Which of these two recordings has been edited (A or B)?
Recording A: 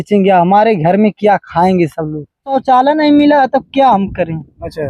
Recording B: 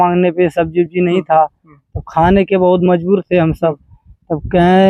A